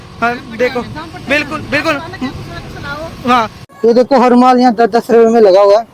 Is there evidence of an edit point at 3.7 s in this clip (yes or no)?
yes